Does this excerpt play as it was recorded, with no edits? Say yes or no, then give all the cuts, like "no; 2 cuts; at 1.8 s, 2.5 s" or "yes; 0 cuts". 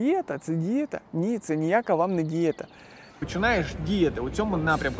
no; 1 cut; at 3.2 s